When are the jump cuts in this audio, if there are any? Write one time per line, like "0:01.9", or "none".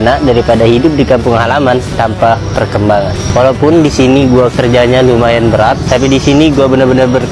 none